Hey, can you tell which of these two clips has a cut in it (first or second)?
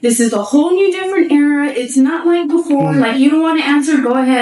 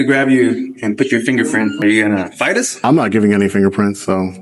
second